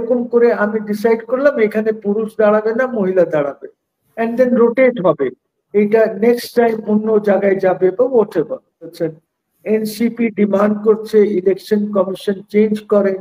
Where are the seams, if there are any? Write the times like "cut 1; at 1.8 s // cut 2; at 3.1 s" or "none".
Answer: cut 1; at 8.9 s